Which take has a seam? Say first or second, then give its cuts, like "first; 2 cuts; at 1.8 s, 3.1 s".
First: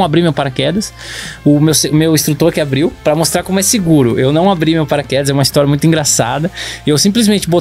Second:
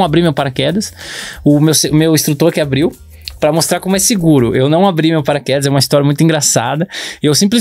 first; 1 cut; at 3.0 s